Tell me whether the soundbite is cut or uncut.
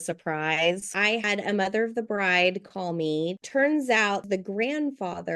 cut